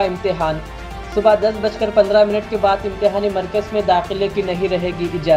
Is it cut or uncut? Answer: uncut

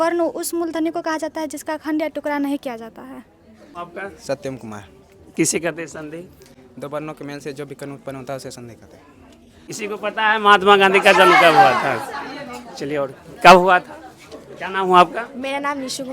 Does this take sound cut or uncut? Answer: cut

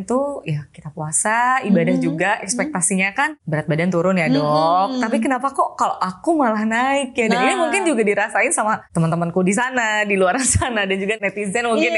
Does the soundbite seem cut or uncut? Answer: cut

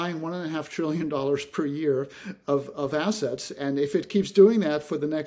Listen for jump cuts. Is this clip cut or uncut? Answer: uncut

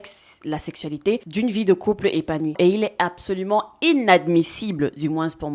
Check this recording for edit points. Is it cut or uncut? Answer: cut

